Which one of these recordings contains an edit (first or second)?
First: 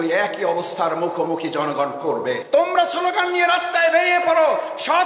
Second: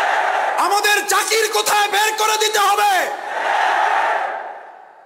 first